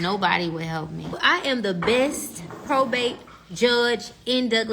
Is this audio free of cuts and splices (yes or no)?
no